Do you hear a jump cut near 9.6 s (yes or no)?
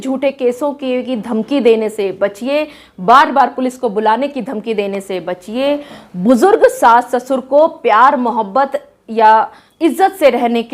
yes